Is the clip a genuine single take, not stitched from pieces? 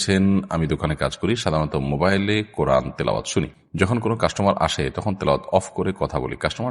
no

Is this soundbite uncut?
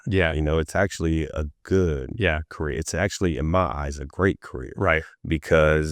yes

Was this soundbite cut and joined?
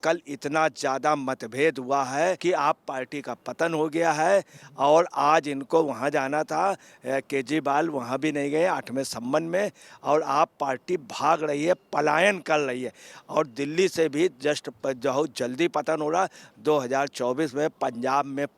yes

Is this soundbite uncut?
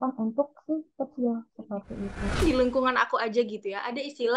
no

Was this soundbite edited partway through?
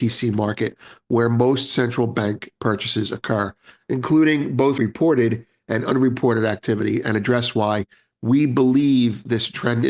yes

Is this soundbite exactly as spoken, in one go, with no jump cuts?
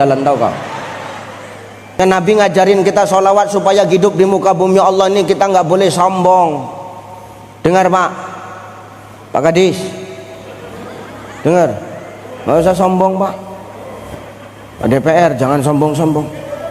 no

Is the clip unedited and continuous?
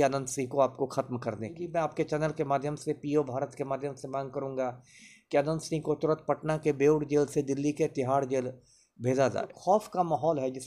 no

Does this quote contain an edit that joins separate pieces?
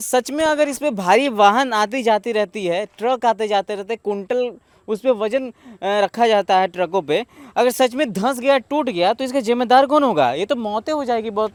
no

